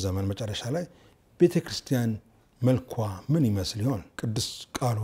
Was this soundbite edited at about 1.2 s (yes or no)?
no